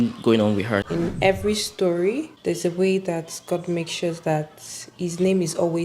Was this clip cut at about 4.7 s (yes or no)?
no